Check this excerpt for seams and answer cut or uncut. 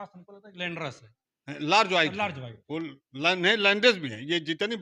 uncut